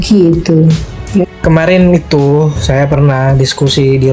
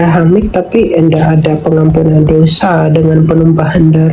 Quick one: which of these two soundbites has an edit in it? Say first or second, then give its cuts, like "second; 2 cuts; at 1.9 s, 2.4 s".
first; 1 cut; at 1.3 s